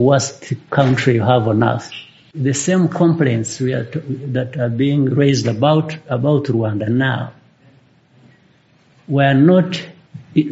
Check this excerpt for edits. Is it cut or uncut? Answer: cut